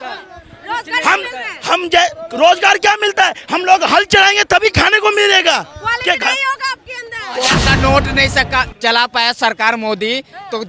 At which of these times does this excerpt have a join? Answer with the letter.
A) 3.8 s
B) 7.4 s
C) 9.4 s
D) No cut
B